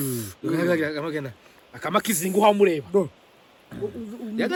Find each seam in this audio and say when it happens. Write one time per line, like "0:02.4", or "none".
none